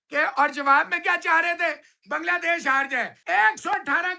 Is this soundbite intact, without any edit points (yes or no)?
no